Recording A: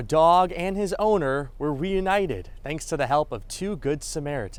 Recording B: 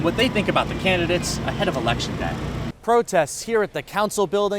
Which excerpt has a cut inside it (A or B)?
B